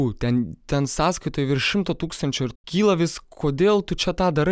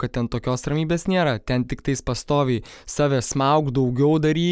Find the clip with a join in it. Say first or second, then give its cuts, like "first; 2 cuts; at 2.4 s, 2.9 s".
first; 1 cut; at 2.5 s